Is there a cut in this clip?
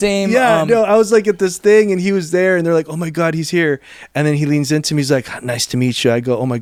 no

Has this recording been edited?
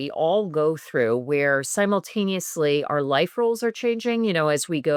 no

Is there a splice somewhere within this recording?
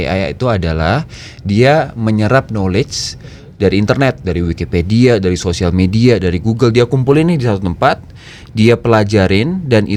no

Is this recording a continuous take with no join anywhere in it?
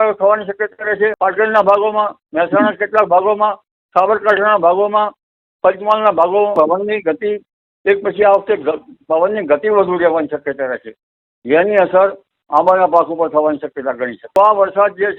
no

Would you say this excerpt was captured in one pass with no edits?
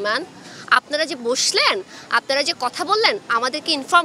yes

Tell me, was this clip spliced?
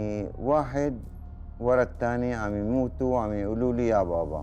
no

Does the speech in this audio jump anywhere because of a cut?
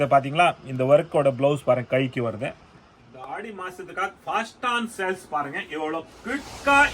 yes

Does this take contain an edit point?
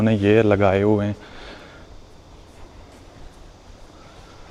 no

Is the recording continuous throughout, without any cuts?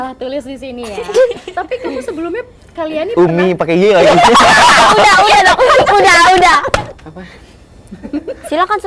no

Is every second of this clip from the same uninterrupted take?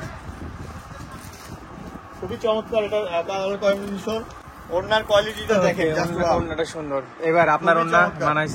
no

